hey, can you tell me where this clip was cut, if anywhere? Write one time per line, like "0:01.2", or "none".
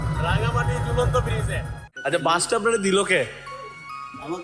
0:01.7